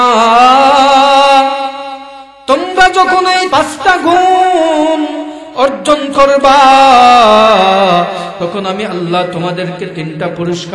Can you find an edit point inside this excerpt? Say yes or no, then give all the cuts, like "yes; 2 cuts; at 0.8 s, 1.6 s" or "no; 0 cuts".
yes; 1 cut; at 3.5 s